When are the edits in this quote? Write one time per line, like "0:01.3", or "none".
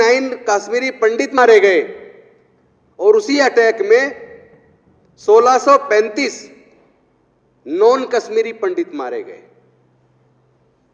0:01.4